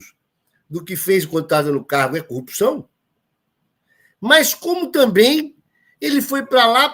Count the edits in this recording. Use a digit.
0